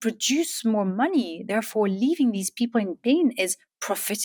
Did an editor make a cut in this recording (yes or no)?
no